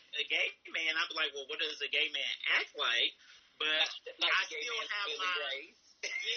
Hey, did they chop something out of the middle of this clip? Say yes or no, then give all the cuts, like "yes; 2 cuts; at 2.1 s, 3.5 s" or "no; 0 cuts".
no; 0 cuts